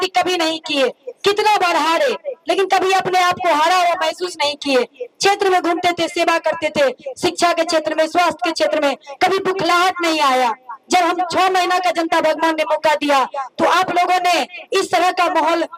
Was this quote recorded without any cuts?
yes; 0 cuts

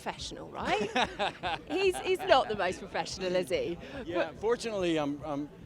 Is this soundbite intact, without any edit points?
yes; 0 cuts

